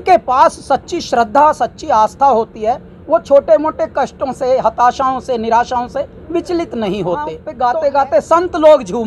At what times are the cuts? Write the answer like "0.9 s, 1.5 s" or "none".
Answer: 7.4 s